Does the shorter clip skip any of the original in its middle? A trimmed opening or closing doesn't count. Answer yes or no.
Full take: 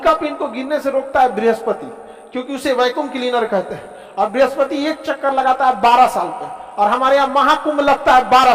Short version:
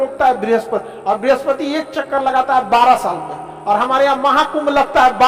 yes